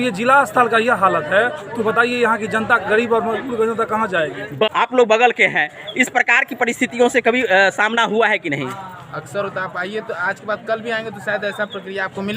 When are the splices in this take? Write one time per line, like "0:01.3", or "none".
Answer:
0:04.7